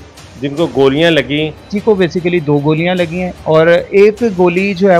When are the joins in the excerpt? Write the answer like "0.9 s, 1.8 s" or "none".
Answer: 1.7 s, 3.4 s

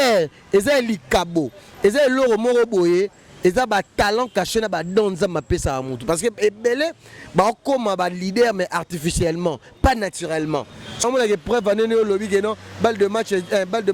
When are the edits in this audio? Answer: 11.0 s

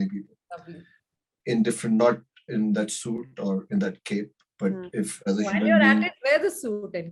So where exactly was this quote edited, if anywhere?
none

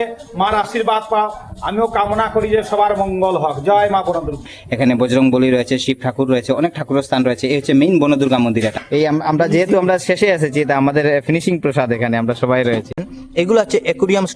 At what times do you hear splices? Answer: 4.6 s, 8.8 s, 13.1 s

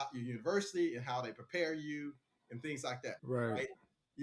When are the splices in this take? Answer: 3.2 s

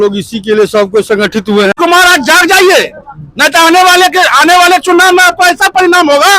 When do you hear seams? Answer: 1.7 s

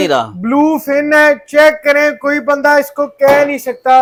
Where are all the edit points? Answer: none

